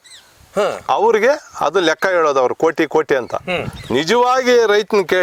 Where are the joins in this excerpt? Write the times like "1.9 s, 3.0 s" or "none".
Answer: none